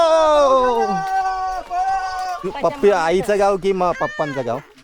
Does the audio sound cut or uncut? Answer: cut